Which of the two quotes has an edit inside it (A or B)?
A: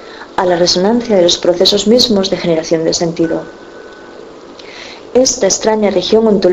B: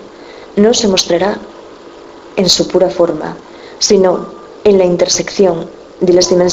A